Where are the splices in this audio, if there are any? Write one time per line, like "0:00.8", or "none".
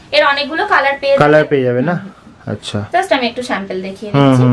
none